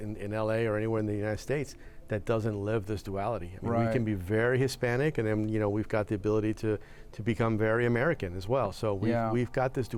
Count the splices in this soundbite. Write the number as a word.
zero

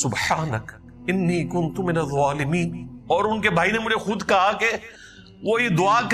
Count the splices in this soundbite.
one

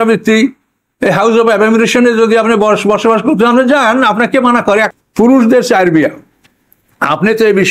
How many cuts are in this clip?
one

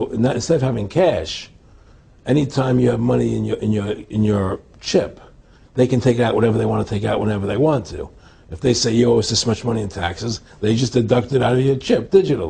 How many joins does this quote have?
one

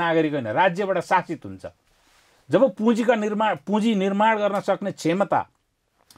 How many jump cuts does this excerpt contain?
zero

